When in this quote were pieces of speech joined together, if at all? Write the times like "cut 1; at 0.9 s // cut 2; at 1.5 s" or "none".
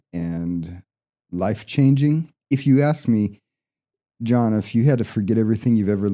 cut 1; at 2.3 s